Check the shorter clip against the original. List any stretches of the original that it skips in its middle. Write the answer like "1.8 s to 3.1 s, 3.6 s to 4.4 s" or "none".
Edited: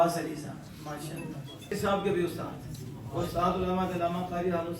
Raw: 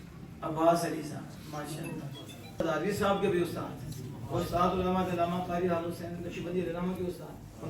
2.4 s to 2.9 s

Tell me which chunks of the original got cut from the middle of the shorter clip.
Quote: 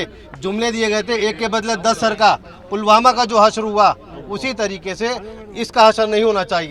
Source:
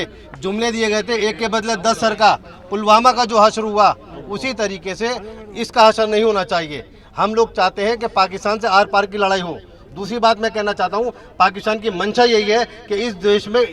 none

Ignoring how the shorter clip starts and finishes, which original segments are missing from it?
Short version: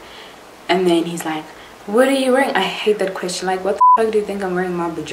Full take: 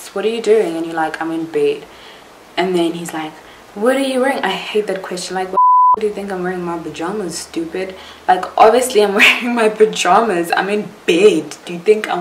none

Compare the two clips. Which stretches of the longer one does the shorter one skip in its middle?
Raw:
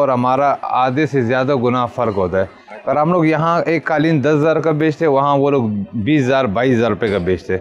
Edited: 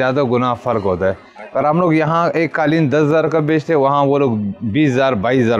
none

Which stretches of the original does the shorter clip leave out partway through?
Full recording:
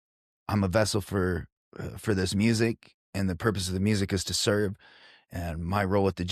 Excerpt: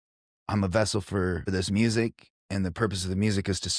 1.5 s to 2.1 s

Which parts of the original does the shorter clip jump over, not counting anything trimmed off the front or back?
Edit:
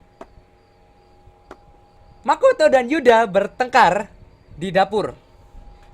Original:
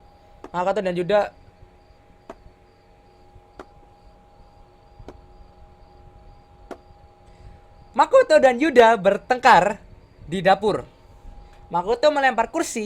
4.1 s to 7.7 s

